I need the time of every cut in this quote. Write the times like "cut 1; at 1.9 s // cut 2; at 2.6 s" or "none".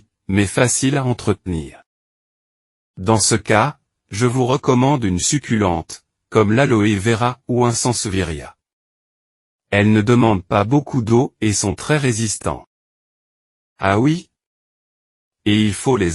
none